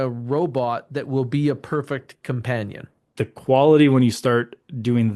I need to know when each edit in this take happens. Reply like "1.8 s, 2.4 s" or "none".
3.1 s